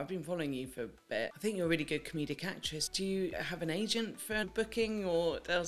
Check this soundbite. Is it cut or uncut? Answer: cut